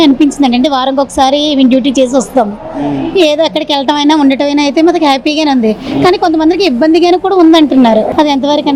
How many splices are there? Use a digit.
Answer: 0